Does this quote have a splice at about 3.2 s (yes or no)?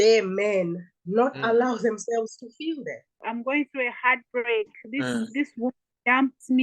yes